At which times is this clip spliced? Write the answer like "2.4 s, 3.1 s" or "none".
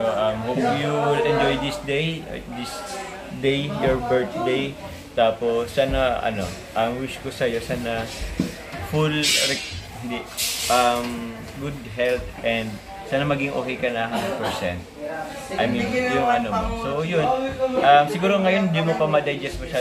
none